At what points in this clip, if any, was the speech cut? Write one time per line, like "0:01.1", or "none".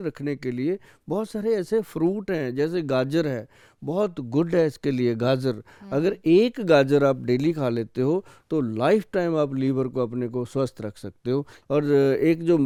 none